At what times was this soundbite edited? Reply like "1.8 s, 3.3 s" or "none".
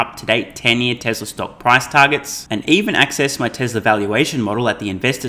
none